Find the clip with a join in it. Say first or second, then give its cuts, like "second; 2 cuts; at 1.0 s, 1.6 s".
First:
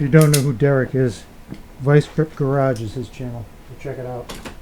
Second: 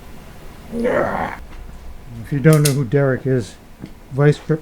second; 1 cut; at 1.4 s